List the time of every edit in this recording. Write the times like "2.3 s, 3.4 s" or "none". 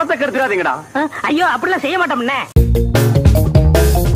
2.6 s